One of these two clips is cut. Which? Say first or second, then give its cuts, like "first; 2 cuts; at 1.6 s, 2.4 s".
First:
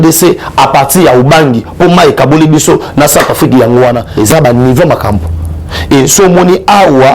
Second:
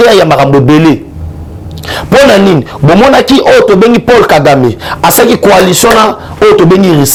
first; 1 cut; at 4.1 s